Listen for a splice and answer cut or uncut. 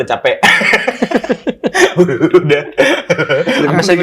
uncut